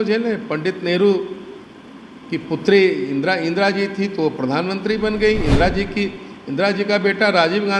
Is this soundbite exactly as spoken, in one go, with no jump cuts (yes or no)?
yes